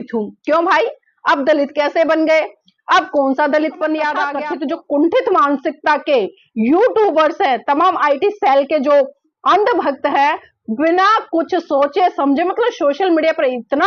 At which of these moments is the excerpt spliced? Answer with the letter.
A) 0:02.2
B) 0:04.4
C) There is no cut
B